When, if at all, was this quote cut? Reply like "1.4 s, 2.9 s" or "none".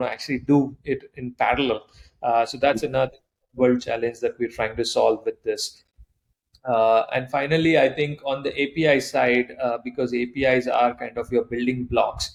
none